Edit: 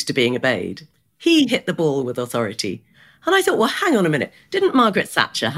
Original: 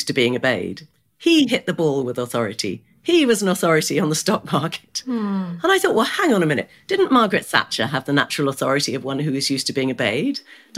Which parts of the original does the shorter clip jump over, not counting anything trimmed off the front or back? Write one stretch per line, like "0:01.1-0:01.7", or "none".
0:03.0-0:05.4